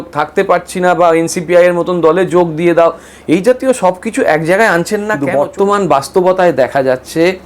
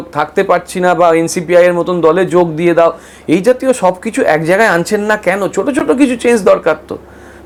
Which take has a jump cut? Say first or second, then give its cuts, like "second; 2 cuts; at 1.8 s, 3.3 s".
first; 1 cut; at 5.2 s